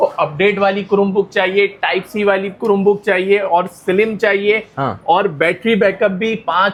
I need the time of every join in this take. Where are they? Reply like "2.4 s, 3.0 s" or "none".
none